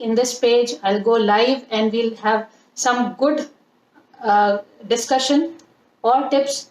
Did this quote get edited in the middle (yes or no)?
no